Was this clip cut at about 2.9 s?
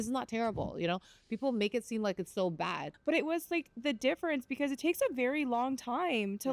yes; 1 cut; at 2.9 s

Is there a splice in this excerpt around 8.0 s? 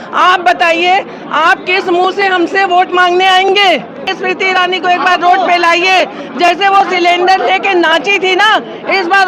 no; 1 cut; at 4.1 s

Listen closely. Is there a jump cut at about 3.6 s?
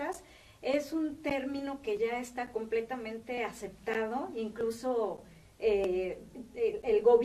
yes; 1 cut; at 3.6 s

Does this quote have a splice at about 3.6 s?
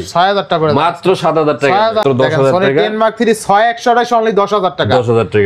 no; 1 cut; at 2.0 s

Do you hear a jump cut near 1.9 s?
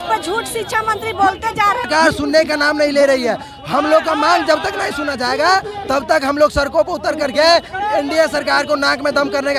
yes; 1 cut; at 1.9 s

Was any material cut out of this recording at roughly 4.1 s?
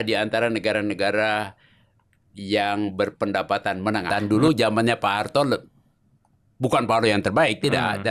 yes; 1 cut; at 4.1 s

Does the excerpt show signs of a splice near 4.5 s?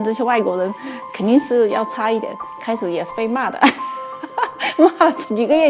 no; 0 cuts

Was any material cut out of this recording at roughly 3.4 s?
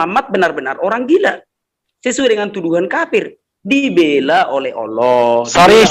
no; 0 cuts

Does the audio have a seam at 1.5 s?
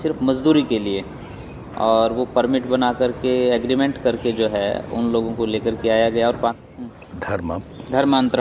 no; 1 cut; at 6.6 s

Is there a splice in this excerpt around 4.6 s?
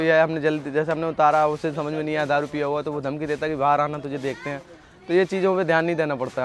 no; 0 cuts

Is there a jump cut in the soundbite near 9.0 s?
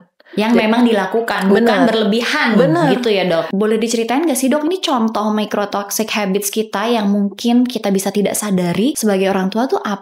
yes; 2 cuts; at 3.5 s, 9.0 s

